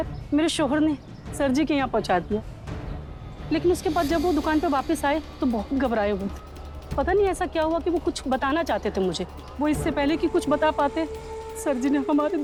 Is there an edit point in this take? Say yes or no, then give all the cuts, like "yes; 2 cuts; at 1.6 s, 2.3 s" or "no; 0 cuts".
no; 0 cuts